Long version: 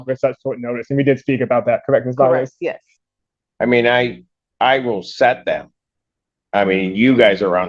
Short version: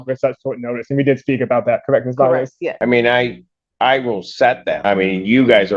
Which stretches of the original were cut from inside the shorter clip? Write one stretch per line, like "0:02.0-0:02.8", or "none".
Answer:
0:02.7-0:03.5
0:05.6-0:06.5